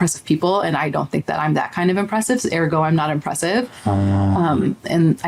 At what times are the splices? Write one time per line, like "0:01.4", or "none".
none